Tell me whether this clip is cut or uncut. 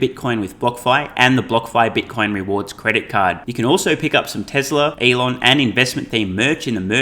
cut